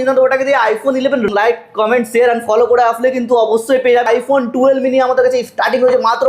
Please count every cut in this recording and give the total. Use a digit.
2